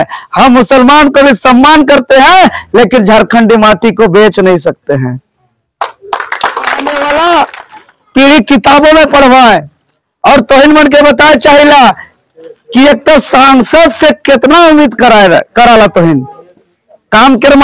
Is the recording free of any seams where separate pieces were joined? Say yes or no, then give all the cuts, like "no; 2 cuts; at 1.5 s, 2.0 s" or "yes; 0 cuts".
no; 1 cut; at 6.9 s